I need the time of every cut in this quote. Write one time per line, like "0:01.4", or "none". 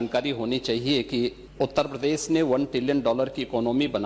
0:01.4